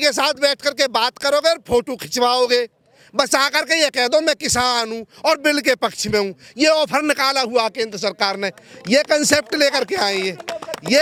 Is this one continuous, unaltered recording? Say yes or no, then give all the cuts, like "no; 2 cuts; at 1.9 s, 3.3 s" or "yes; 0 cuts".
yes; 0 cuts